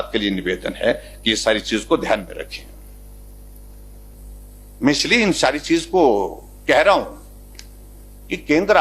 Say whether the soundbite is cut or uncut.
cut